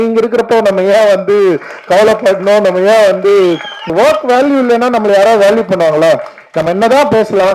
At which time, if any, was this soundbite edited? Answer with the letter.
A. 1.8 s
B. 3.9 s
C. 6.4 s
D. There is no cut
B